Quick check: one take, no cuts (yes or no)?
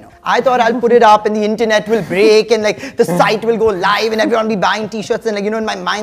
yes